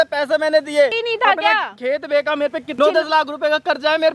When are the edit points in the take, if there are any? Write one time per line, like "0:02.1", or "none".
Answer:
0:01.0
0:02.8